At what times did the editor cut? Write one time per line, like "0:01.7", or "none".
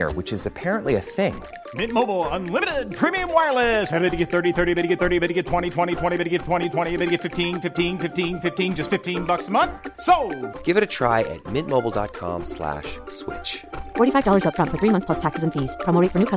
none